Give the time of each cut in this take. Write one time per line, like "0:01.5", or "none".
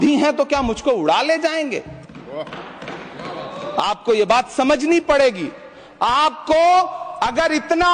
none